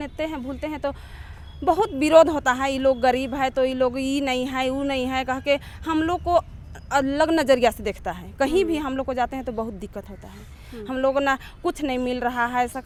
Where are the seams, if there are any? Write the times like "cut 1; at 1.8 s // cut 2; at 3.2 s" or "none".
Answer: none